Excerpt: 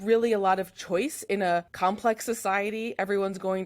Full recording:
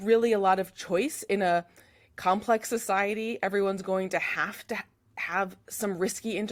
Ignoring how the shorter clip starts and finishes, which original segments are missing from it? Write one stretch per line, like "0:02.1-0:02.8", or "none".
0:01.7-0:02.1